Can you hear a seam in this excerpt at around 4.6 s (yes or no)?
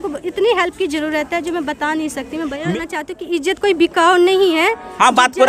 no